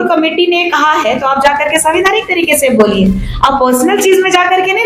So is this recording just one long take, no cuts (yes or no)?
yes